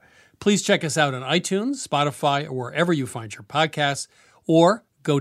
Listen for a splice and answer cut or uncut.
uncut